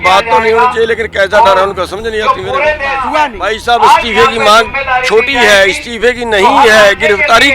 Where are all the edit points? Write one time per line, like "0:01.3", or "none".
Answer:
0:03.1